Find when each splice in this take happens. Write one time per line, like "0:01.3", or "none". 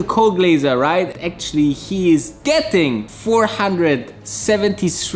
0:01.2
0:03.1